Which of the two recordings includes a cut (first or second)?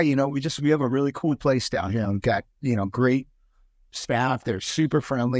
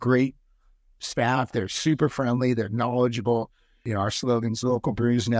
second